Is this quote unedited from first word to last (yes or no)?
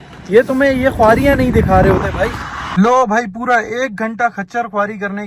no